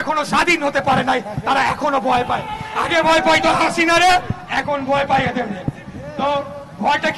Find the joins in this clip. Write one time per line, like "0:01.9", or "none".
none